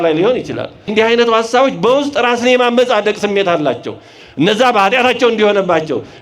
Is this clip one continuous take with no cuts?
no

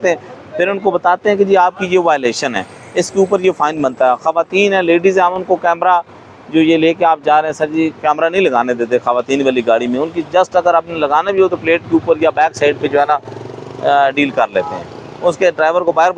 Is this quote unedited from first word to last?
yes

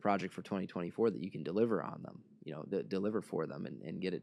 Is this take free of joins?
yes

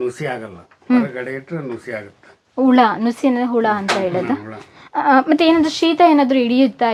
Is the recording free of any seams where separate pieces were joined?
yes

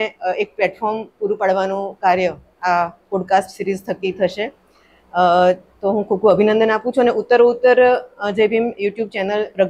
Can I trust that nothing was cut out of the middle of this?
yes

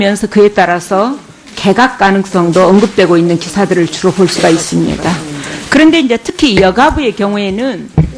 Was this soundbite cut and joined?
no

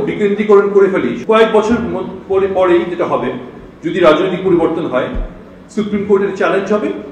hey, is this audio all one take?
no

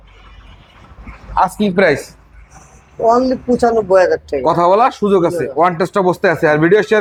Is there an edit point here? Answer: no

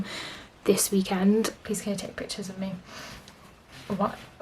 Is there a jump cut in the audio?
yes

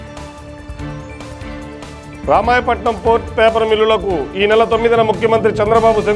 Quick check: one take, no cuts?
no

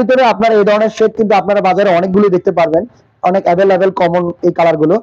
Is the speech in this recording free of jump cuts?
yes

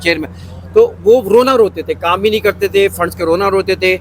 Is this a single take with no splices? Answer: yes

